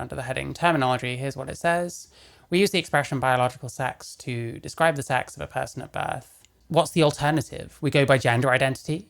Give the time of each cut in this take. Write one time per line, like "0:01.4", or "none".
0:06.6